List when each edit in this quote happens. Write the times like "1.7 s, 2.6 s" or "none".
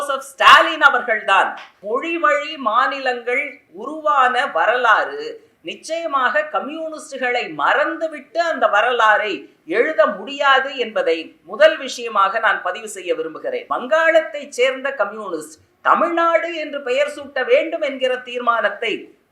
1.7 s, 13.6 s